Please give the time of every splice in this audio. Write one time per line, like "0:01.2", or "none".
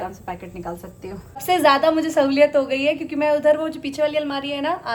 none